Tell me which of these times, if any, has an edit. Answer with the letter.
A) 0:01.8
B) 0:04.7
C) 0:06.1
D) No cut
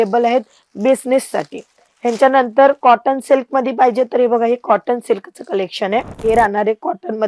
C